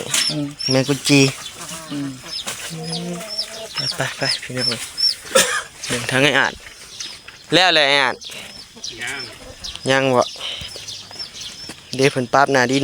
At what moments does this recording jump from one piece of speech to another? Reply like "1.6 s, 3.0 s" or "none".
none